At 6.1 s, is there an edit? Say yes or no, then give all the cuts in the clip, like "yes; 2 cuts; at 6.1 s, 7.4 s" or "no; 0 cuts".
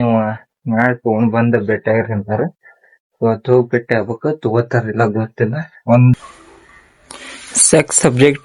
yes; 1 cut; at 6.1 s